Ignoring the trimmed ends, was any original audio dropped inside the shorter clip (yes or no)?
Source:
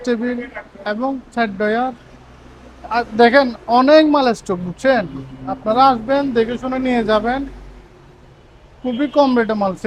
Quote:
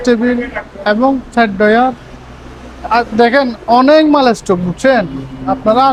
no